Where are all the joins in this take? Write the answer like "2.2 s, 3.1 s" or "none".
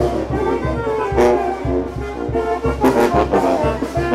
none